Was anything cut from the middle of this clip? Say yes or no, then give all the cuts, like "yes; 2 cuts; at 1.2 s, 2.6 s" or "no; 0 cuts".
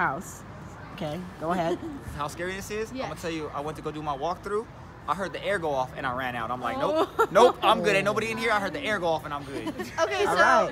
no; 0 cuts